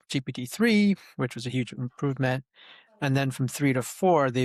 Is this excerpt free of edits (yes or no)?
yes